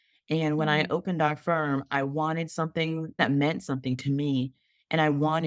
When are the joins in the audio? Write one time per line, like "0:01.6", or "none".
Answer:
0:03.2